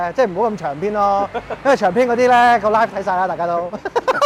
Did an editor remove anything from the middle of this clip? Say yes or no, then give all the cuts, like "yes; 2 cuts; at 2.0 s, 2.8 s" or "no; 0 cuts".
no; 0 cuts